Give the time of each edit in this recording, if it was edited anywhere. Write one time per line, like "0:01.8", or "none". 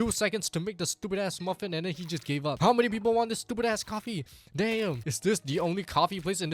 0:02.6
0:05.1